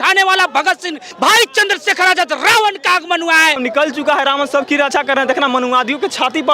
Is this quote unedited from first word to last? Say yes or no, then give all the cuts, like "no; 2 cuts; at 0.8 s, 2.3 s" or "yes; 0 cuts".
no; 2 cuts; at 1.0 s, 3.6 s